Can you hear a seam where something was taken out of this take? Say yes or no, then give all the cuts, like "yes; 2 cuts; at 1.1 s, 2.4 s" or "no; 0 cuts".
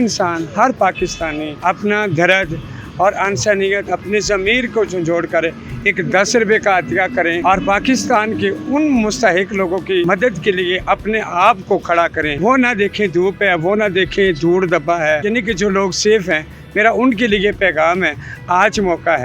no; 0 cuts